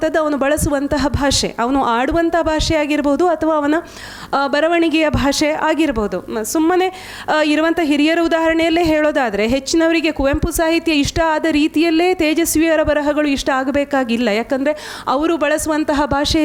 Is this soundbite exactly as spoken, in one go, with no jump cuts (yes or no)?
yes